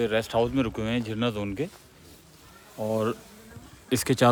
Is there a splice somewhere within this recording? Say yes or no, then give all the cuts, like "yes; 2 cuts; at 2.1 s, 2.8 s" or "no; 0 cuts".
no; 0 cuts